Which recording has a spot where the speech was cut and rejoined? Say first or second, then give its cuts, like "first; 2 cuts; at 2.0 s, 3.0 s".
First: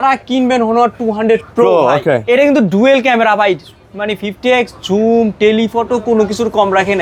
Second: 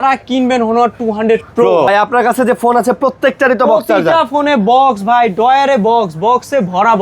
second; 1 cut; at 1.9 s